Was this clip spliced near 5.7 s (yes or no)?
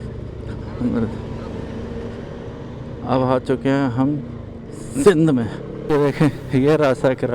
yes